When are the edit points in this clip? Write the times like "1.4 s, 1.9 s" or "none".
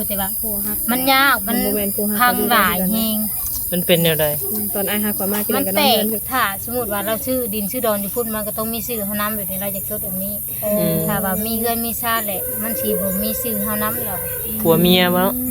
6.2 s